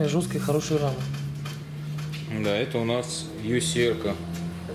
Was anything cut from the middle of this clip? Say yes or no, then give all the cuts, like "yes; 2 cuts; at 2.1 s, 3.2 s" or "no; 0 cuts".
no; 0 cuts